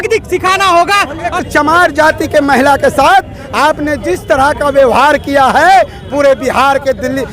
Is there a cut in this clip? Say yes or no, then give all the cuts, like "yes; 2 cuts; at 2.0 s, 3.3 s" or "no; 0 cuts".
yes; 1 cut; at 1.4 s